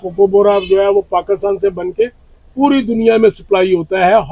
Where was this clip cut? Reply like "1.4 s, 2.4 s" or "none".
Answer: none